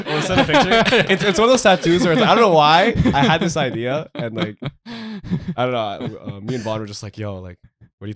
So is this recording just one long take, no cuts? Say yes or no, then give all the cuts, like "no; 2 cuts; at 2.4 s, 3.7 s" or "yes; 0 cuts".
yes; 0 cuts